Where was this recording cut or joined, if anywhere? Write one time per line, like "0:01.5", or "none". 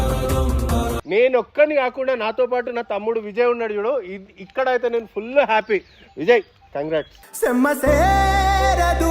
0:00.9